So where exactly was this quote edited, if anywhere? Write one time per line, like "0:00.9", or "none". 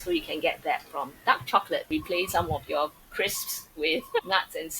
0:01.9